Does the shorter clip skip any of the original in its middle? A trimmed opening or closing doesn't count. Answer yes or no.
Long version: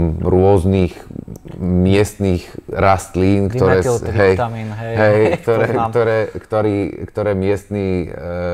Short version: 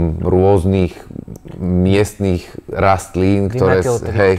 no